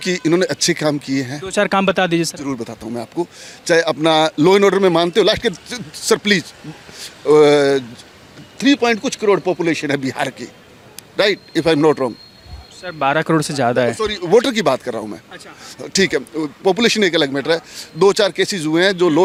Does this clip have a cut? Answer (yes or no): no